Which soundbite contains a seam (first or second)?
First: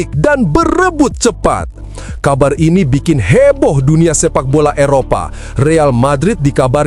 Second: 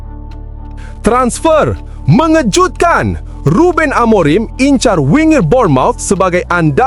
second